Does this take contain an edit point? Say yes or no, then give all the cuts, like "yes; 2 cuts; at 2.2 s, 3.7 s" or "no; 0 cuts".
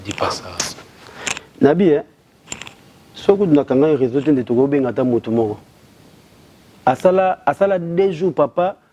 no; 0 cuts